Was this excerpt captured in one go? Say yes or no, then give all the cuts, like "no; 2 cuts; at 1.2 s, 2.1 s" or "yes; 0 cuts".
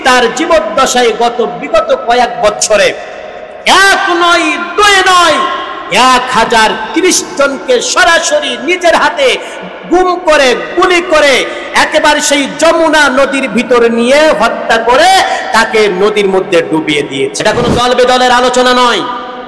no; 1 cut; at 17.4 s